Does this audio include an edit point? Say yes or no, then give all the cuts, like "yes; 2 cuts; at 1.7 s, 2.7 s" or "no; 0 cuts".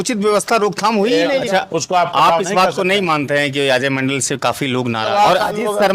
yes; 2 cuts; at 1.4 s, 5.1 s